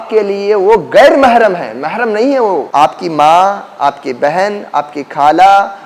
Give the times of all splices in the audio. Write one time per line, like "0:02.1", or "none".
0:02.7